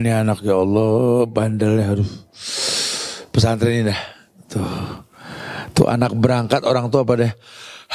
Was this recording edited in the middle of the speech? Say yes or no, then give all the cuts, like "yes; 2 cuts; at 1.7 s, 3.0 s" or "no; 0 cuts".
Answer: no; 0 cuts